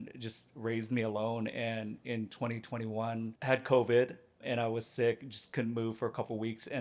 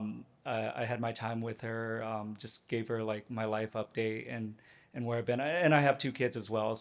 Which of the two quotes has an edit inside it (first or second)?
first